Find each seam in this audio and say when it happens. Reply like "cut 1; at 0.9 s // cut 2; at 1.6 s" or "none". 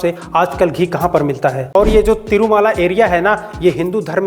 cut 1; at 1.7 s